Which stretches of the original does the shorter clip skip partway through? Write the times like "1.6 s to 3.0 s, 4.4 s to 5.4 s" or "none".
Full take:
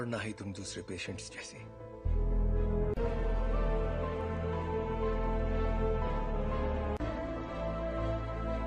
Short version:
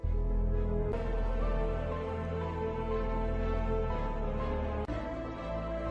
3.0 s to 3.1 s